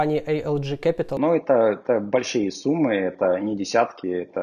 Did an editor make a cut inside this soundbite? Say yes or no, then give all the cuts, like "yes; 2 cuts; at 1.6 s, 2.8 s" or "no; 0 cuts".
yes; 1 cut; at 1.1 s